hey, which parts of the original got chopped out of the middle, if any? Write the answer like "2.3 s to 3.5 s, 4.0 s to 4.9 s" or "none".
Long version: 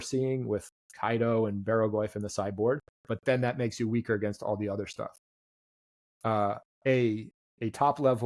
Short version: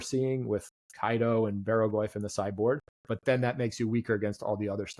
none